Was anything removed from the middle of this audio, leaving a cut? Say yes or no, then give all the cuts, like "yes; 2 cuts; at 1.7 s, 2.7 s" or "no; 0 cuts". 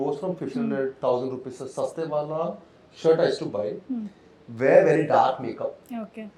no; 0 cuts